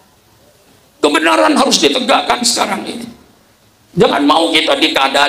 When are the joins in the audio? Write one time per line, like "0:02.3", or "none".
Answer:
none